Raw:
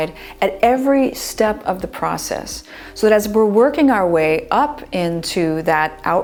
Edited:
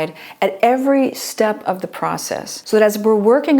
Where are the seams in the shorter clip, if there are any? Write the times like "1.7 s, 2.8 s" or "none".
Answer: 2.5 s